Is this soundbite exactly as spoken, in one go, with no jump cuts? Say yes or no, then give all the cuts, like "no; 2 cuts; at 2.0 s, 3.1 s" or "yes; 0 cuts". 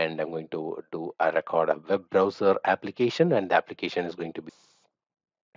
no; 1 cut; at 4.5 s